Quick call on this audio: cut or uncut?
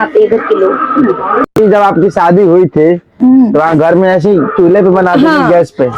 uncut